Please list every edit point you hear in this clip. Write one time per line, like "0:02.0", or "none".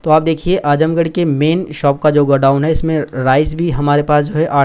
none